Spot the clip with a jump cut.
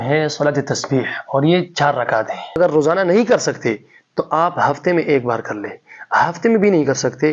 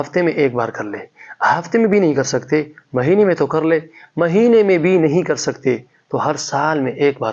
first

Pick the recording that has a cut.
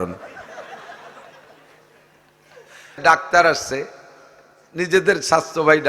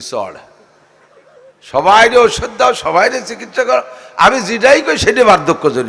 first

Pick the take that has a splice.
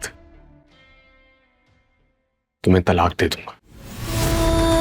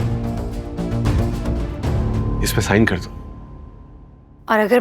second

